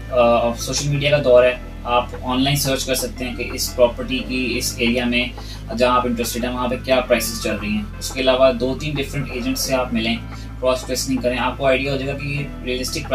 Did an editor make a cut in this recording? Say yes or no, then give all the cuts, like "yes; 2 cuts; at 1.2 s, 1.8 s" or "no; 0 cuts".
no; 0 cuts